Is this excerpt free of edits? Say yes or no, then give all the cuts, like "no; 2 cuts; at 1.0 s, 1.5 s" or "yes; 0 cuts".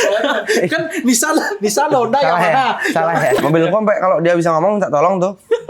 no; 1 cut; at 3.4 s